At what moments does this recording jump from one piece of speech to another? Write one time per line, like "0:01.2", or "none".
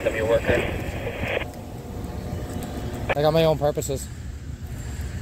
0:03.0